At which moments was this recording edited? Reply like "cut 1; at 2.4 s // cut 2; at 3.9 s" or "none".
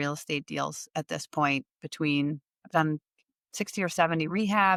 none